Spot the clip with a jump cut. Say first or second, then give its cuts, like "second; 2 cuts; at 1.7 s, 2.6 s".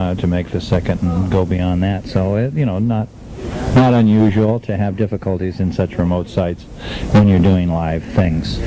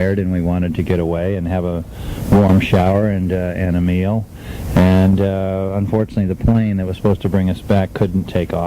second; 1 cut; at 5.6 s